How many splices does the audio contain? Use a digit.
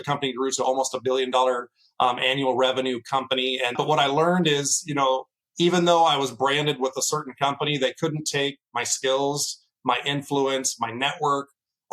1